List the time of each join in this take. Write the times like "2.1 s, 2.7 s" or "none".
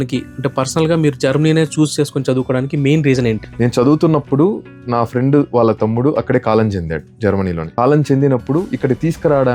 3.5 s, 7.6 s